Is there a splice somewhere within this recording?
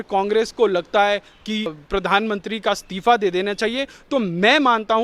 yes; 1 cut; at 1.8 s

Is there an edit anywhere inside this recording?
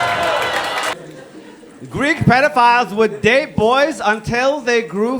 yes; 1 cut; at 0.9 s

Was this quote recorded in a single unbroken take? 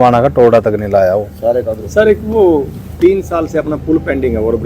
no; 1 cut; at 1.8 s

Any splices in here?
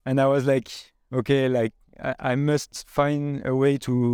no; 0 cuts

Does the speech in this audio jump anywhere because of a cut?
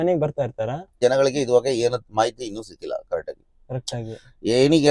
yes; 1 cut; at 0.9 s

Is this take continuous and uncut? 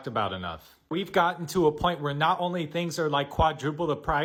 yes; 0 cuts

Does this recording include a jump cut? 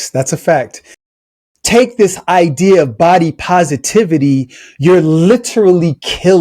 yes; 1 cut; at 0.9 s

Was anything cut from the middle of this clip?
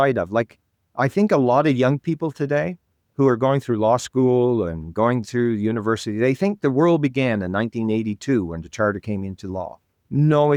no; 0 cuts

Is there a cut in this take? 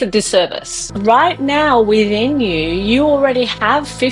yes; 1 cut; at 1.0 s

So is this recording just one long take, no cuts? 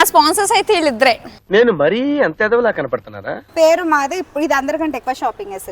no; 1 cut; at 3.4 s

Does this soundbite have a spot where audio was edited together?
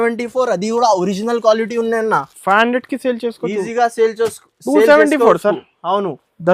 no; 0 cuts

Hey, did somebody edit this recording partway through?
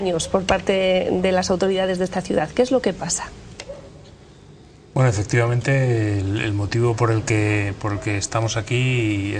no; 0 cuts

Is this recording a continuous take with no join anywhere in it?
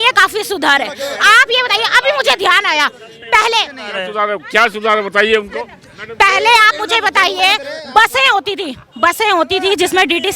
yes; 0 cuts

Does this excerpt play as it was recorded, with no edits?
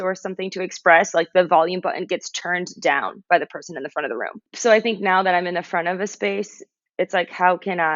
no; 1 cut; at 4.4 s

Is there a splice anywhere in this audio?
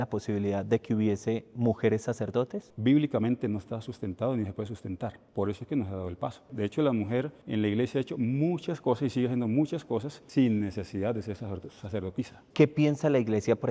yes; 3 cuts; at 2.6 s, 6.5 s, 12.4 s

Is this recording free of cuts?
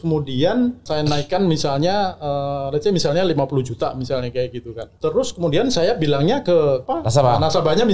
no; 3 cuts; at 0.9 s, 4.8 s, 6.8 s

